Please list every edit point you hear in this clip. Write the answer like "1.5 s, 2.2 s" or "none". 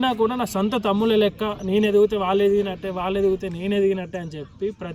none